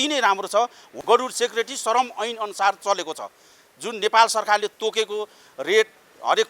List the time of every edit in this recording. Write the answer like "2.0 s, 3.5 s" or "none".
0.9 s